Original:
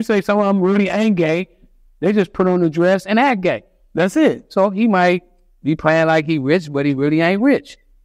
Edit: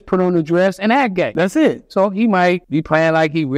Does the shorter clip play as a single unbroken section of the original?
no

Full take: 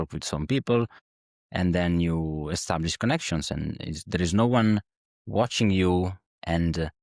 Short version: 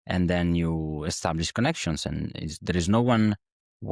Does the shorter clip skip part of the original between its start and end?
no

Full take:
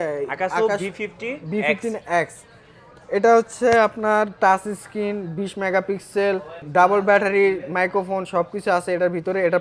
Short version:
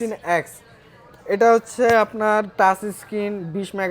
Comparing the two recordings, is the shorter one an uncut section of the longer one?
yes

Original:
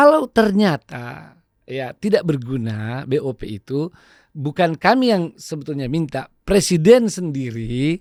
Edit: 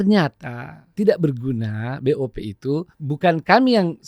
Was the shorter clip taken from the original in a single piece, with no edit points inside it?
no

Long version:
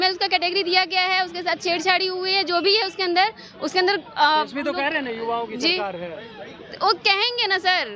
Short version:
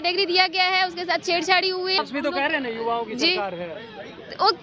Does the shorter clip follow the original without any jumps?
no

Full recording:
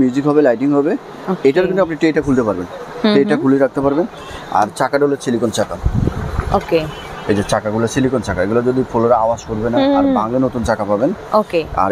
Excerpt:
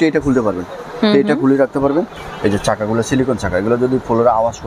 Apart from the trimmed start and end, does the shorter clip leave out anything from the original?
yes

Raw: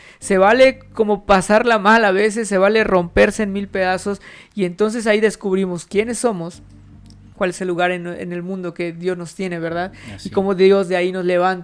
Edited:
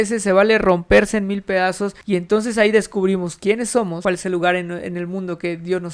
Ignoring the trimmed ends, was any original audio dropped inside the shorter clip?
yes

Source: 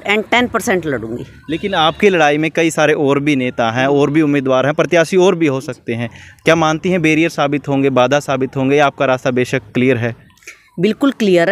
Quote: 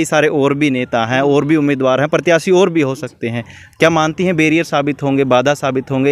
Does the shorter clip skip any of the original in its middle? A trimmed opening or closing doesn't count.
no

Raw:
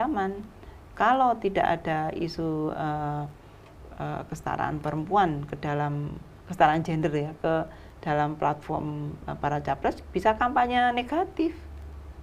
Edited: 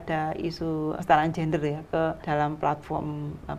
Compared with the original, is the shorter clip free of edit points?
no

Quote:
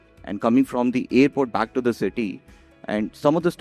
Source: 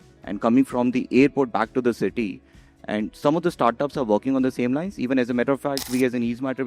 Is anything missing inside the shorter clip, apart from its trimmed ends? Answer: no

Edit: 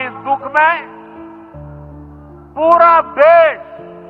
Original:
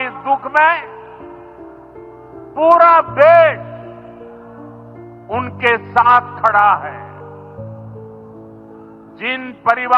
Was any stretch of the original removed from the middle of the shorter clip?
no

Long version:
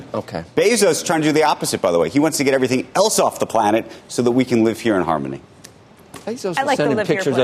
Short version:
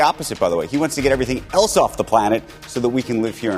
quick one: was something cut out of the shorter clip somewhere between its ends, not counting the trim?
no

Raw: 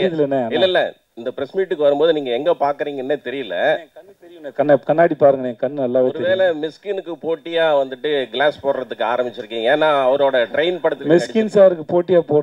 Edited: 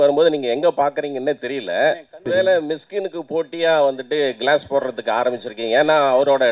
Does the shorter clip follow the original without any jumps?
no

